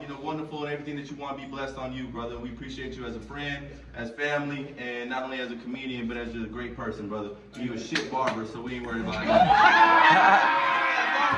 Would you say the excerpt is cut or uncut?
uncut